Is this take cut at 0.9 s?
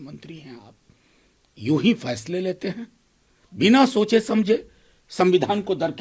no; 0 cuts

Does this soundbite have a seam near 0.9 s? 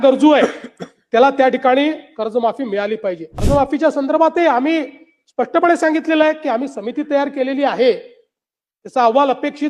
no; 1 cut; at 3.3 s

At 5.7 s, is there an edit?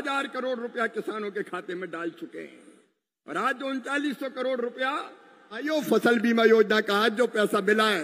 yes; 1 cut; at 5.7 s

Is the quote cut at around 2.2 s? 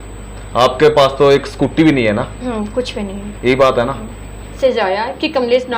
no; 1 cut; at 4.5 s

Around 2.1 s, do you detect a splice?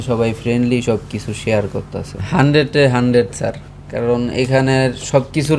yes; 1 cut; at 2.1 s

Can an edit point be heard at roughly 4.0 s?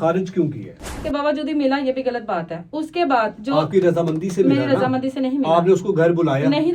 no; 1 cut; at 1.0 s

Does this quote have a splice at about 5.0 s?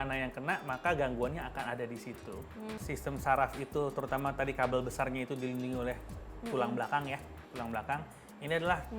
no; 1 cut; at 2.8 s

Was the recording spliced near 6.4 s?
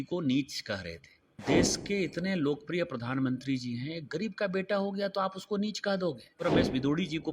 yes; 2 cuts; at 1.4 s, 6.4 s

